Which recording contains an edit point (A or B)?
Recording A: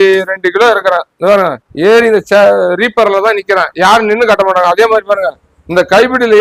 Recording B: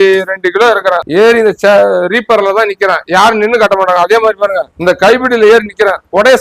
B